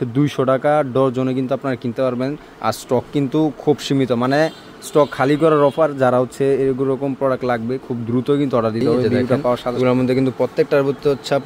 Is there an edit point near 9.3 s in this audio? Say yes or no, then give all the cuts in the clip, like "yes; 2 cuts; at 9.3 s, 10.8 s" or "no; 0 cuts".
yes; 1 cut; at 9.3 s